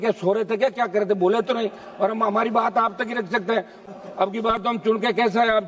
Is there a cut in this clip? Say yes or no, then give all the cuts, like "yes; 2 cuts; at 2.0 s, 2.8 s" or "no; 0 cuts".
yes; 1 cut; at 3.8 s